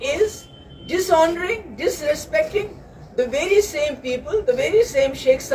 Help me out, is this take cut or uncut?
uncut